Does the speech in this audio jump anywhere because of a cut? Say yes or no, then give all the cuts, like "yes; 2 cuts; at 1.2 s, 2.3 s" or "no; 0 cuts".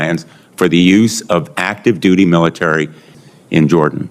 yes; 1 cut; at 3.2 s